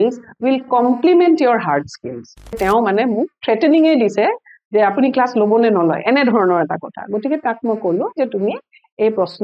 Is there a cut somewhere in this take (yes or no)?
yes